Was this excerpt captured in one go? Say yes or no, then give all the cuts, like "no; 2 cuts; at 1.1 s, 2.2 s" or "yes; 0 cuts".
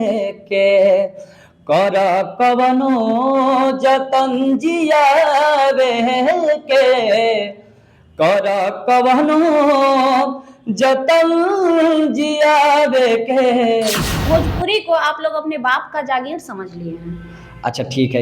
no; 1 cut; at 14.2 s